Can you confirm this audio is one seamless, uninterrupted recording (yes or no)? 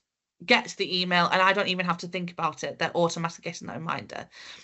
yes